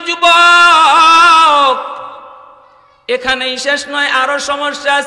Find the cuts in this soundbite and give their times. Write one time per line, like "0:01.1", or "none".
none